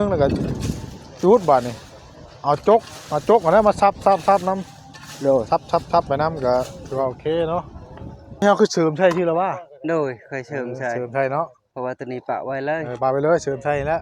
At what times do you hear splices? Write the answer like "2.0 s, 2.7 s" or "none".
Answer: 8.4 s